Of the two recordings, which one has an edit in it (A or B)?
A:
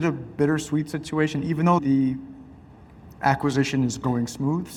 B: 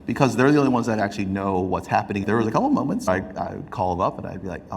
B